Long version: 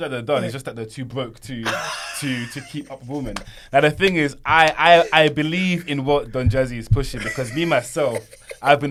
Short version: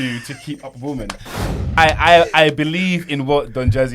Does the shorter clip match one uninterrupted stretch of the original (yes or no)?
no